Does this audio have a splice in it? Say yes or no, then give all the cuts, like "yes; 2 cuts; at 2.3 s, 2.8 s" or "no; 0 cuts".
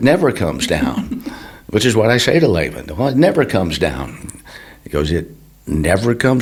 no; 0 cuts